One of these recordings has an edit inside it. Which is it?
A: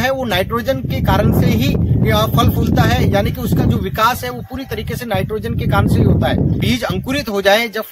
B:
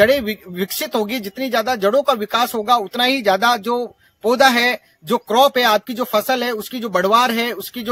A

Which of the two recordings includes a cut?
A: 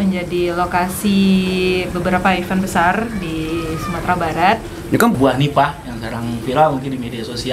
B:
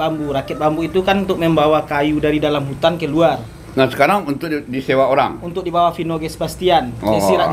A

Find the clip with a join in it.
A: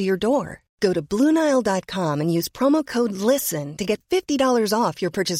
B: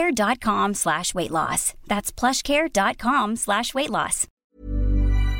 B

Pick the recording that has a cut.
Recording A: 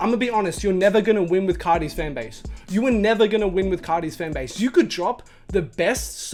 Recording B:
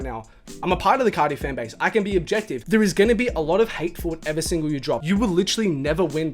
B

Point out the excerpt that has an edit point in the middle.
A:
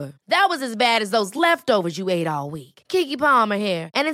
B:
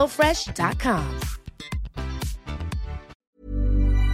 B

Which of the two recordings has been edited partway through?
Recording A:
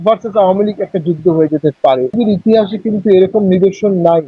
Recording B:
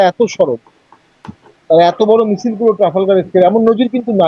A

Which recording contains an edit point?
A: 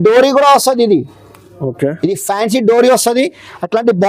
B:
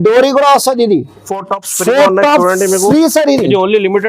B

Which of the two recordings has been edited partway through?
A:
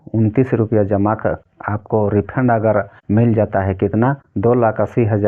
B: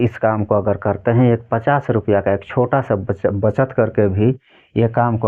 A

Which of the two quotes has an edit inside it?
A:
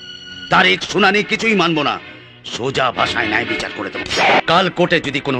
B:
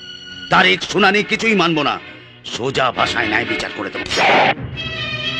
A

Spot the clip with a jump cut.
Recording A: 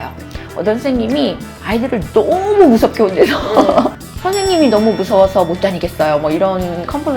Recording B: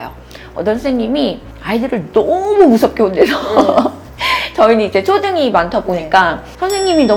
A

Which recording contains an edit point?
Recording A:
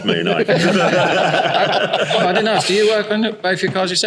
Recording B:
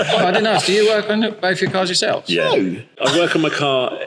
B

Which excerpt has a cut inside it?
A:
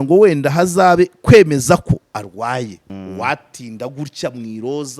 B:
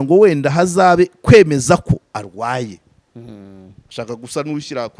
A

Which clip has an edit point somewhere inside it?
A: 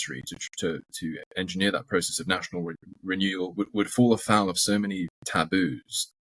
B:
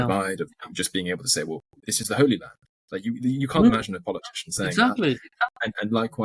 B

